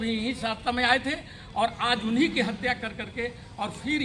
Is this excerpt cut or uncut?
uncut